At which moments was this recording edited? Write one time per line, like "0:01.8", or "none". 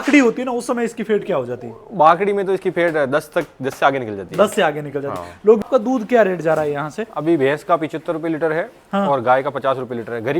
0:05.6